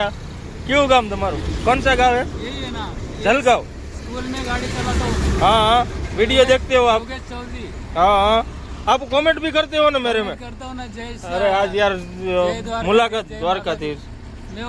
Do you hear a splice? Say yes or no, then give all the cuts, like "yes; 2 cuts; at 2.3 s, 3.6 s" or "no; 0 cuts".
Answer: no; 0 cuts